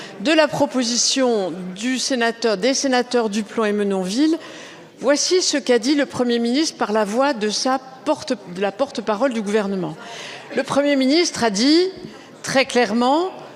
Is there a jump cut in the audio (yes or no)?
no